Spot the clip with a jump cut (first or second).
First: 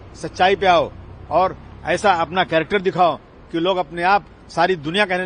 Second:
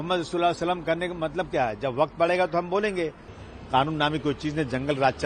second